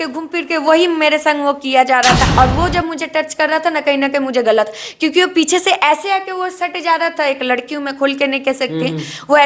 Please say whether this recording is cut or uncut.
cut